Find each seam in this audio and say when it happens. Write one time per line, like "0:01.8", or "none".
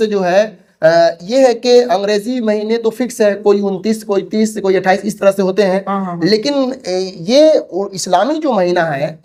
none